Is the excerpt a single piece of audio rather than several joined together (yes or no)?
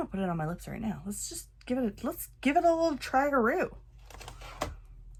yes